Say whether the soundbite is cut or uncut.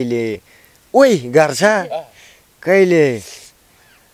uncut